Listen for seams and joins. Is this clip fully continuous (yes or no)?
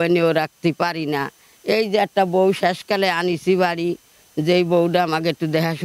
yes